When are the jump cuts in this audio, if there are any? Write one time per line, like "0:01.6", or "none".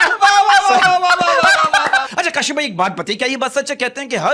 0:02.1